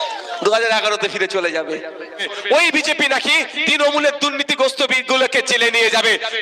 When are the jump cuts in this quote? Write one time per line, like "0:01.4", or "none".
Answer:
0:02.3